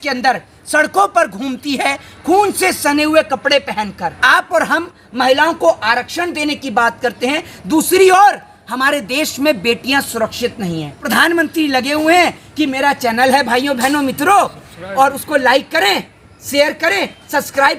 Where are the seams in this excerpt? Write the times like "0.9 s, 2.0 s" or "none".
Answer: 4.2 s, 11.0 s